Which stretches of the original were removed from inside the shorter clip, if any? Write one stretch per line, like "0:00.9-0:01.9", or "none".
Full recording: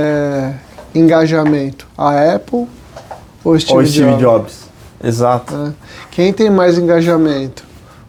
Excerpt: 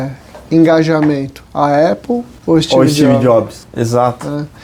0:02.7-0:03.3
0:04.6-0:04.9